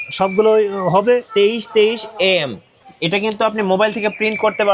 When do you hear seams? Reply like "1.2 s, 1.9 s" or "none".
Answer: 1.3 s